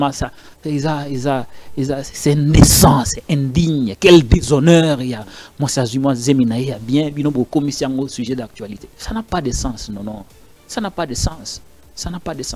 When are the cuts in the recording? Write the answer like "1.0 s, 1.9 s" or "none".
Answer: none